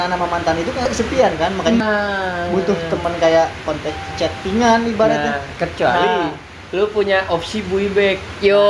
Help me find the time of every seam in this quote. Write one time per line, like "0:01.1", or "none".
0:00.8
0:01.8